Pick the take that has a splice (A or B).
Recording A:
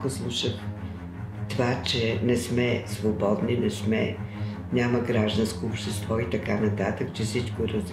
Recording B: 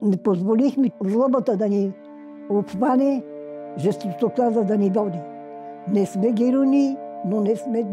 B